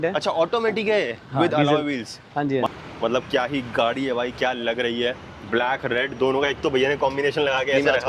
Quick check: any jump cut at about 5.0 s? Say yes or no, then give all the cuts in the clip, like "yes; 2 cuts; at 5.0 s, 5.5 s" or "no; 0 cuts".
no; 1 cut; at 2.7 s